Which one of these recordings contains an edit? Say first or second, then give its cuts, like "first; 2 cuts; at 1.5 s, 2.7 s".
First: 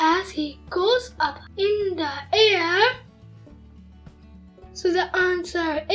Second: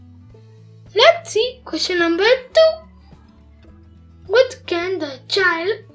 second; 1 cut; at 0.9 s